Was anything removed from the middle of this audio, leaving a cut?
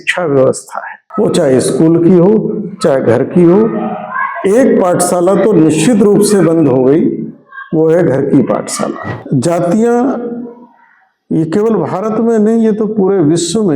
yes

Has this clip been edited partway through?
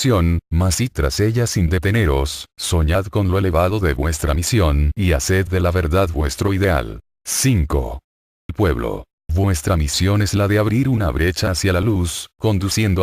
yes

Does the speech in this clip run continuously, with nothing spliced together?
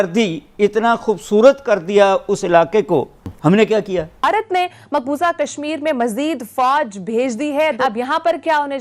no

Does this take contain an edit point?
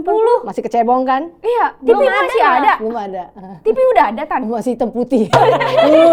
no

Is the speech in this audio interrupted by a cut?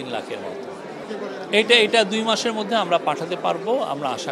no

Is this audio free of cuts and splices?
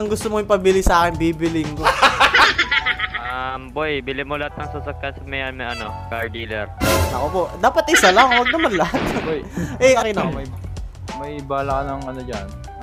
no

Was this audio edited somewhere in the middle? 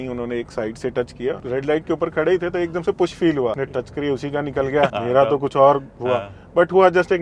yes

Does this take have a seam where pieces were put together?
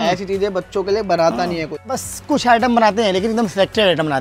yes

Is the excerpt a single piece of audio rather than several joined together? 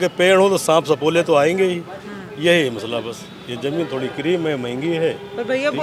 yes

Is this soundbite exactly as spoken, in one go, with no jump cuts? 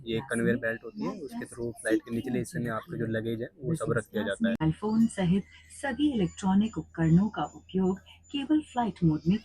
no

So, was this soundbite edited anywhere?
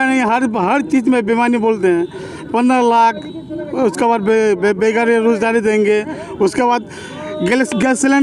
no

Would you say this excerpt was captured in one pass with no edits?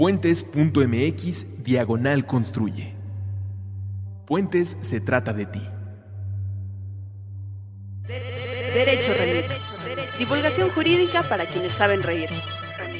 no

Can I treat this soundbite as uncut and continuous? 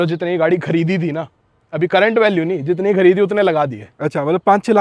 yes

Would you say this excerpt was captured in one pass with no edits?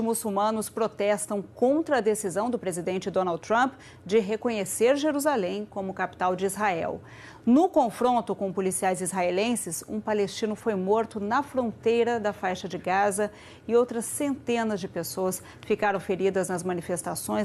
yes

